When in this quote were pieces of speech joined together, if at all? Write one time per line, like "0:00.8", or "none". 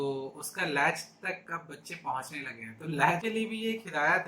0:03.2